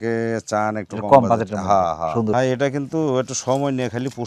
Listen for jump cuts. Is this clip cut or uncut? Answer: cut